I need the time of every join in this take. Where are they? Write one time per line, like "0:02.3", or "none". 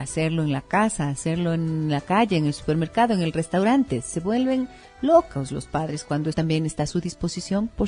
none